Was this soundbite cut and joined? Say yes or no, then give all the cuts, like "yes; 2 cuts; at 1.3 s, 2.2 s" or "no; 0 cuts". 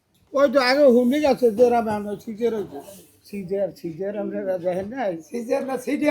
yes; 1 cut; at 3.0 s